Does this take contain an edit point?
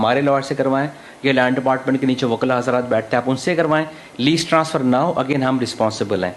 no; 0 cuts

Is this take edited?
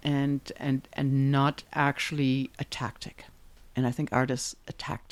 no; 0 cuts

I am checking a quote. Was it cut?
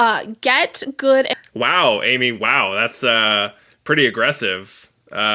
yes; 1 cut; at 1.3 s

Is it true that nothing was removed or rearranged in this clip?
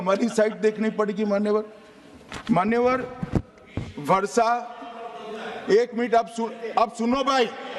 yes; 0 cuts

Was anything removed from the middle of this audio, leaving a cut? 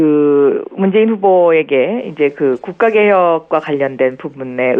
no; 0 cuts

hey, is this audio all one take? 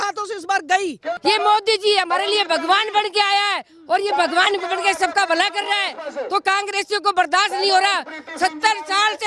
no; 1 cut; at 1.1 s

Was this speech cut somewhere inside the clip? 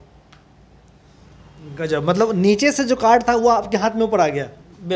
no; 0 cuts

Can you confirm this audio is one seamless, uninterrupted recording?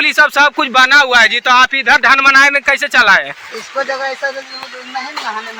yes; 0 cuts

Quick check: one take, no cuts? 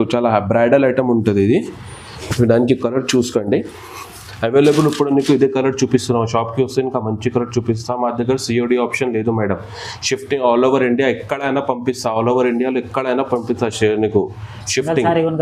yes; 0 cuts

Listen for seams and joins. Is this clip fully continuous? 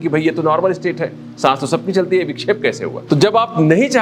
no; 1 cut; at 3.0 s

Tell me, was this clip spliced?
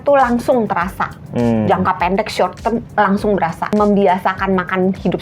yes; 1 cut; at 3.7 s

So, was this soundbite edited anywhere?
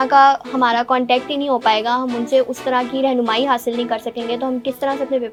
no; 0 cuts

